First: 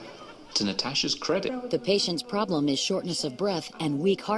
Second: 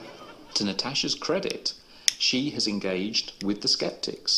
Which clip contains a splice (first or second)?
second